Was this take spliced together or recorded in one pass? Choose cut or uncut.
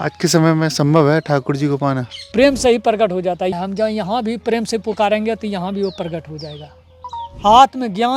cut